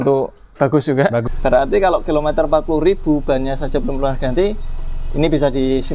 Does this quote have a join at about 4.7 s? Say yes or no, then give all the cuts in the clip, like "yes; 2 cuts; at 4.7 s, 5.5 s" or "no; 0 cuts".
no; 1 cut; at 1.2 s